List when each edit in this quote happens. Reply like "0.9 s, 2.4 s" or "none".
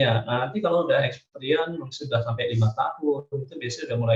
none